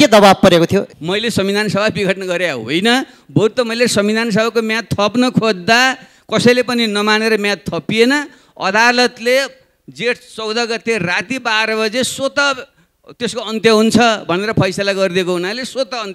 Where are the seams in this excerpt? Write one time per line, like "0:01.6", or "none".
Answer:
0:00.9